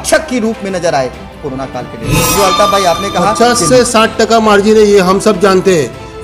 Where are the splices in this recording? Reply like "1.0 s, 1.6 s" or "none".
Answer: 3.4 s